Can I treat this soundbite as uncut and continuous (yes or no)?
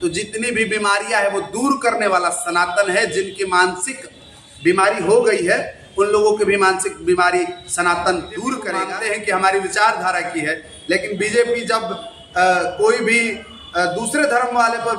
no